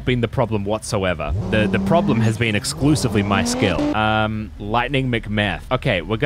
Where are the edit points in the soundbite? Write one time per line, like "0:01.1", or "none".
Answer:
0:01.4
0:03.9